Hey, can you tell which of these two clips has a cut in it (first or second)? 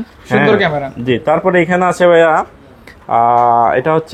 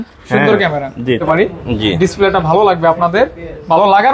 second